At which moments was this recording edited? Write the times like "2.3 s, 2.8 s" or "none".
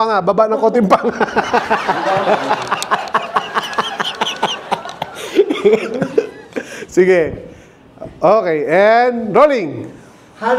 none